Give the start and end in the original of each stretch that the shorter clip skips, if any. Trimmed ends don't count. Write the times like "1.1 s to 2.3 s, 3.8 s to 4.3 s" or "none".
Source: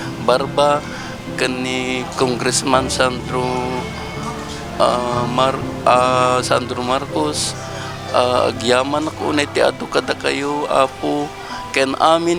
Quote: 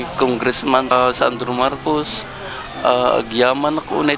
2.9 s to 6.2 s